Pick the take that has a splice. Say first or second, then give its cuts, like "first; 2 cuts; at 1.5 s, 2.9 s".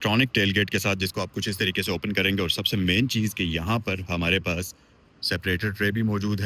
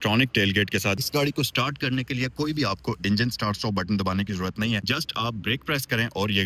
second; 2 cuts; at 1.0 s, 4.8 s